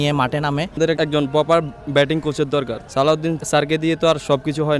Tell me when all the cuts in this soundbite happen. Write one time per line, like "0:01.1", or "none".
0:00.9
0:03.3